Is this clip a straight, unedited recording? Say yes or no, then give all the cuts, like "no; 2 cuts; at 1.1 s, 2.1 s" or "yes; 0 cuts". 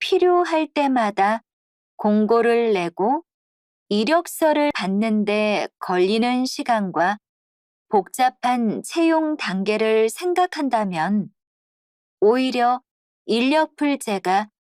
no; 1 cut; at 4.7 s